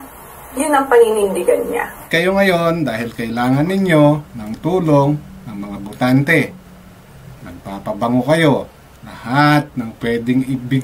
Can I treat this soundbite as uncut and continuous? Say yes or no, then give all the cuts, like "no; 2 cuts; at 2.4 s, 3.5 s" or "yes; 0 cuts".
no; 1 cut; at 2.1 s